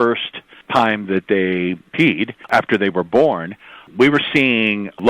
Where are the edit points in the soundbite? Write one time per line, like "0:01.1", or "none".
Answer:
0:02.0